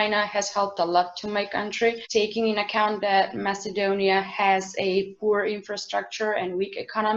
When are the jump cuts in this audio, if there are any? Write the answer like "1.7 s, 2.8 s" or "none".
none